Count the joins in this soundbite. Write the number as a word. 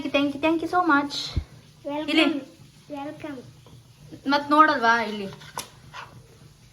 zero